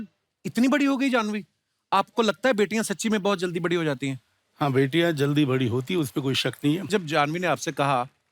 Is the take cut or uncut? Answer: cut